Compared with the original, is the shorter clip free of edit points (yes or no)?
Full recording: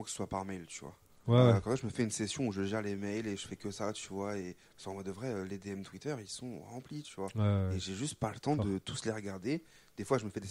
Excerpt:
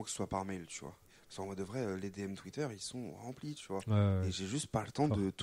no